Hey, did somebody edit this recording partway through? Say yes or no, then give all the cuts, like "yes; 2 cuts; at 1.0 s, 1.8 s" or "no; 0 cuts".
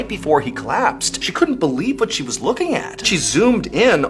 yes; 2 cuts; at 1.2 s, 3.0 s